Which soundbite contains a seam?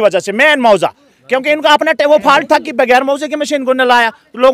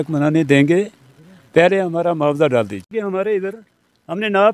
second; 1 cut; at 2.9 s

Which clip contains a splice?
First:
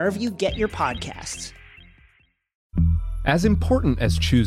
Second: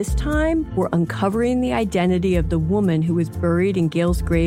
first; 1 cut; at 2.6 s

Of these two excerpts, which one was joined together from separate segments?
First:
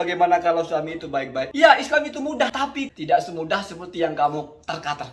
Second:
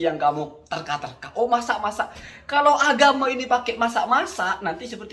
first; 2 cuts; at 1.5 s, 2.6 s

